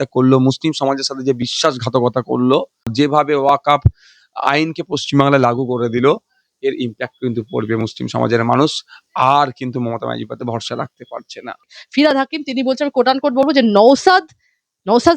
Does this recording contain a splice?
yes; 1 cut; at 11.8 s

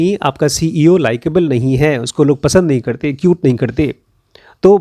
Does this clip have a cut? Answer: no; 0 cuts

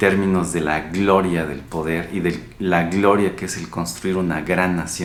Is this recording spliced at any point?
no; 0 cuts

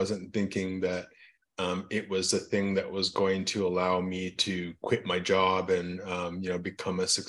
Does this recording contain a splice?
no; 0 cuts

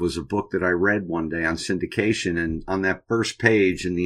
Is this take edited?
no; 0 cuts

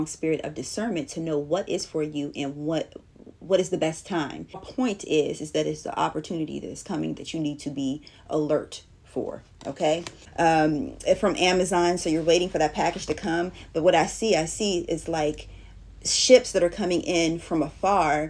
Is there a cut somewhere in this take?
yes; 2 cuts; at 4.7 s, 10.2 s

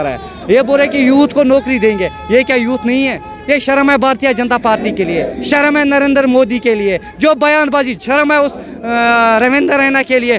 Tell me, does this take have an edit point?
no; 0 cuts

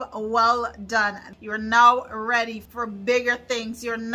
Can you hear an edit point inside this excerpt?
yes; 2 cuts; at 1.3 s, 2.6 s

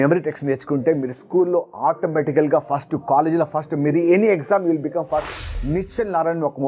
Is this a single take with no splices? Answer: no; 1 cut; at 5.6 s

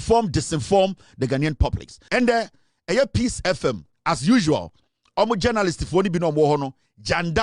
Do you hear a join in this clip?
yes; 2 cuts; at 2.0 s, 3.9 s

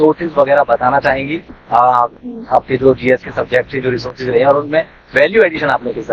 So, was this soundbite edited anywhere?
no; 0 cuts

